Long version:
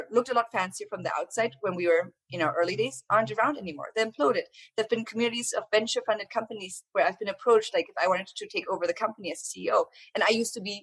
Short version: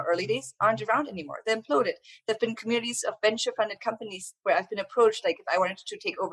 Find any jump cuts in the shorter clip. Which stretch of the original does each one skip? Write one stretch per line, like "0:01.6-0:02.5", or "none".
none